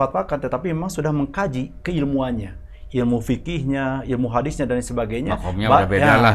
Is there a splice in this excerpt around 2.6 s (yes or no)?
no